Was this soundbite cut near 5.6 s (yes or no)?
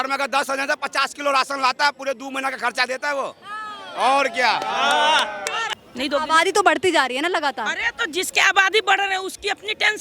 yes